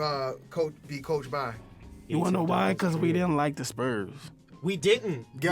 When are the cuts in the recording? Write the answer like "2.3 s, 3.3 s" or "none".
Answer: 2.0 s